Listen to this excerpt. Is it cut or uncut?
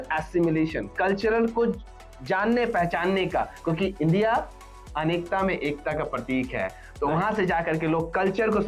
uncut